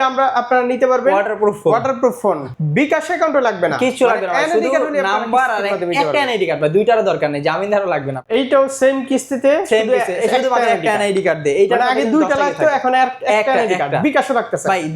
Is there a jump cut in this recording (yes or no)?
yes